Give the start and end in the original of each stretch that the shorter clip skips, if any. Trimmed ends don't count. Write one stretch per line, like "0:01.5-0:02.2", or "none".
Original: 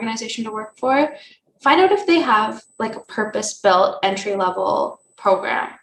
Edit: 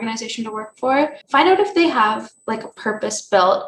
0:01.2-0:01.5